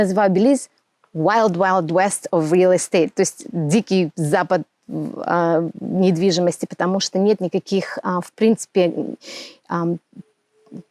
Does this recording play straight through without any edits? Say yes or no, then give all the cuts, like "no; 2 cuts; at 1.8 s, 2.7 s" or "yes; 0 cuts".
yes; 0 cuts